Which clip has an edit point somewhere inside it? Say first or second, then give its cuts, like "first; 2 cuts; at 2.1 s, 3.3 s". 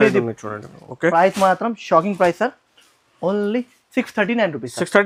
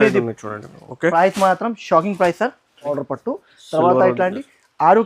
second; 1 cut; at 3.0 s